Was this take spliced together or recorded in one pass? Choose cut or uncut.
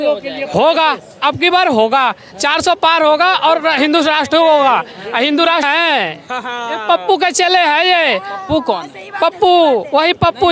cut